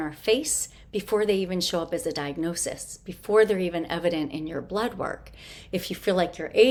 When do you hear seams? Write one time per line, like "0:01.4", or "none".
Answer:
none